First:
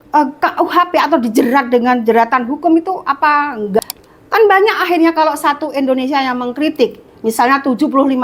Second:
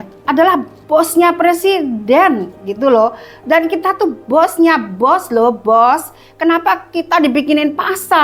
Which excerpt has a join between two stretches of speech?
first; 1 cut; at 3.8 s

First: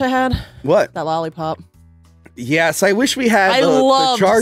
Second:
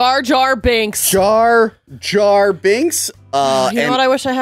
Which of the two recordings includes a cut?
second; 1 cut; at 3.0 s

